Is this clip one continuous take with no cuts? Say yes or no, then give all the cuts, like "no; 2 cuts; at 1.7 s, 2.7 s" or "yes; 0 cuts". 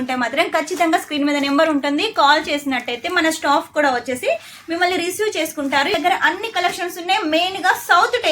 no; 1 cut; at 5.9 s